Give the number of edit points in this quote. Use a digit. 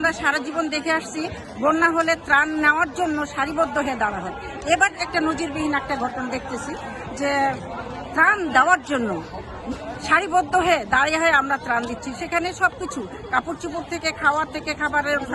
0